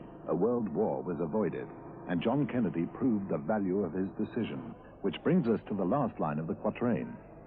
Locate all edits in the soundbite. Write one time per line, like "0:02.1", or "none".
0:03.6